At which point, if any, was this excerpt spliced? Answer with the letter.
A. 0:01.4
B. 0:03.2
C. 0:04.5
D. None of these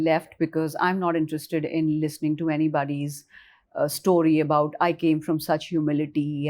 D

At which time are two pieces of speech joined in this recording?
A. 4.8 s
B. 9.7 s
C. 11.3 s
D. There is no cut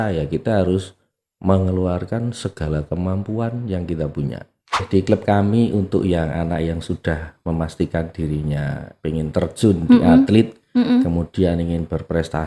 A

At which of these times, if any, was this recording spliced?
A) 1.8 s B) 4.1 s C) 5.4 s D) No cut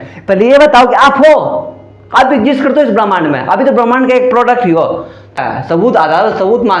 C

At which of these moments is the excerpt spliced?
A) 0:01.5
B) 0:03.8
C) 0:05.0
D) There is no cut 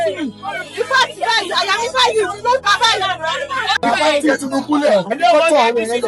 B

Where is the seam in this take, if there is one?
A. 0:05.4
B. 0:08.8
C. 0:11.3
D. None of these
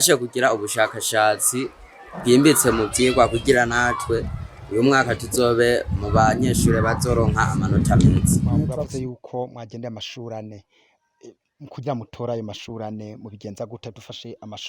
B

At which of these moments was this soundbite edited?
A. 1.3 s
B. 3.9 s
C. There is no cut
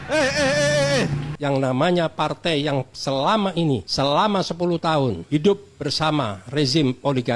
A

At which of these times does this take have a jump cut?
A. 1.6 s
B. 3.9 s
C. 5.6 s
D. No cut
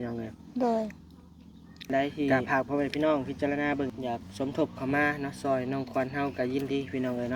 B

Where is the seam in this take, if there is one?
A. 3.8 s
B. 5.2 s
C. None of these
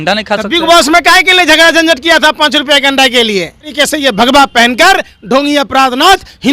A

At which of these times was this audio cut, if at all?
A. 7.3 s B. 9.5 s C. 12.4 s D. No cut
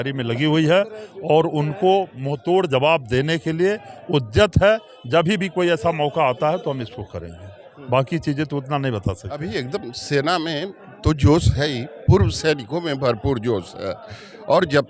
B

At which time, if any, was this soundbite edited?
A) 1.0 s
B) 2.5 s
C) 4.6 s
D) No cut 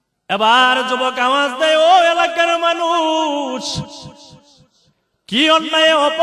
D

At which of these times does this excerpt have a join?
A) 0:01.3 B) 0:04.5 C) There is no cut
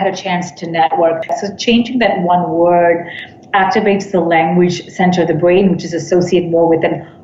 A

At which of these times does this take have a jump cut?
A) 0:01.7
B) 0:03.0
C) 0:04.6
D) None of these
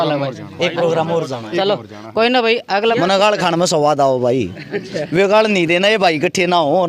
B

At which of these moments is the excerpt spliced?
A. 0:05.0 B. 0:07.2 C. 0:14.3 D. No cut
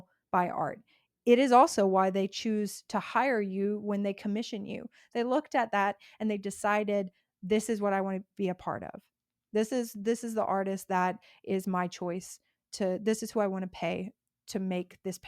A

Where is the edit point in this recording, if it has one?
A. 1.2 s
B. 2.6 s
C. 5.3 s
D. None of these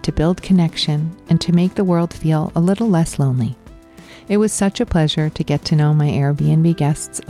D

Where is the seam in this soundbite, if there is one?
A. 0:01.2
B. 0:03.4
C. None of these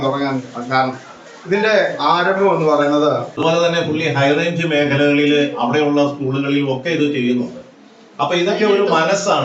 B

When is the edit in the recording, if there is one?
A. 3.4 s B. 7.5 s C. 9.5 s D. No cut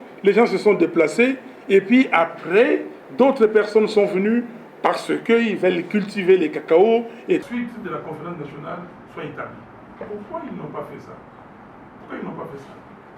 B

